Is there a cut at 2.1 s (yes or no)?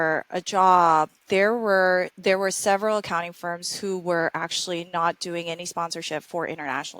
yes